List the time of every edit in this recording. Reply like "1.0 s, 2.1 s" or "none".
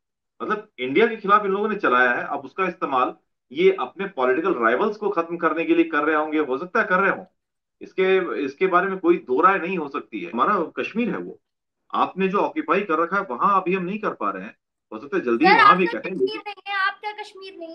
10.3 s